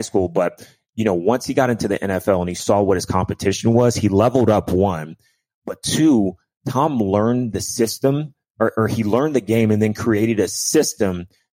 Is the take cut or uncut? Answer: uncut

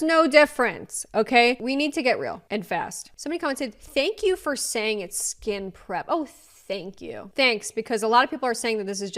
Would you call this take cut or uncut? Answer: cut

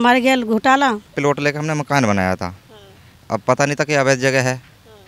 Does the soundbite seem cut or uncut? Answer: cut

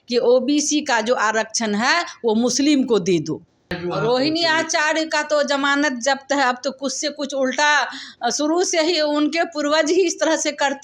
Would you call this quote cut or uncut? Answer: cut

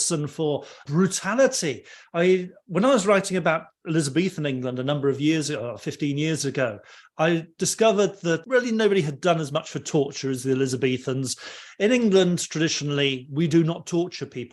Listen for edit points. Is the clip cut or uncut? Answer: uncut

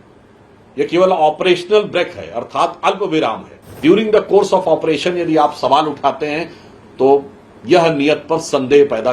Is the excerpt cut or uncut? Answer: cut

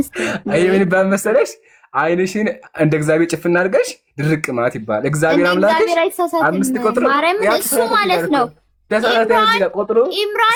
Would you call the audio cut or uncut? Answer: uncut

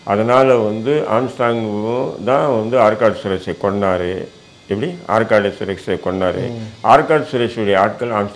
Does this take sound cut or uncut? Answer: uncut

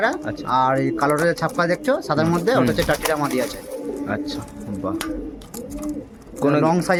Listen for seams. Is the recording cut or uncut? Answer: uncut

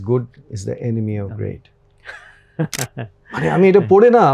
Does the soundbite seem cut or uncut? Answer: uncut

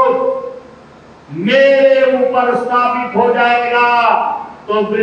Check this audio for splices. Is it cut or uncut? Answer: uncut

